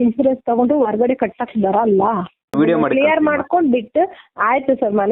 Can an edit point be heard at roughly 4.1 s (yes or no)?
no